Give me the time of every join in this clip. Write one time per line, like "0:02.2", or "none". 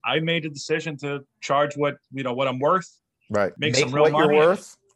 0:01.2
0:03.6

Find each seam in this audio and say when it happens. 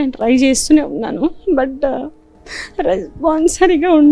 none

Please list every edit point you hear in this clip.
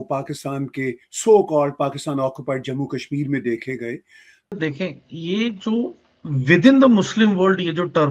0:04.5

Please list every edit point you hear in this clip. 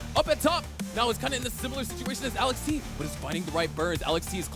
none

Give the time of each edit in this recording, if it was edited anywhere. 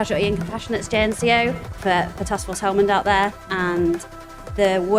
0:01.8
0:03.5

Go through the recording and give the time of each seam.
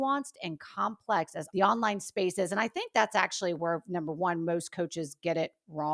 0:01.4

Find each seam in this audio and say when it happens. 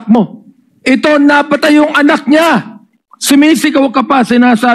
none

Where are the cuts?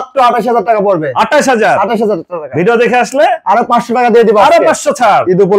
none

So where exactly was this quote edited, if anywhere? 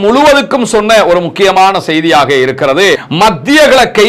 0:03.1

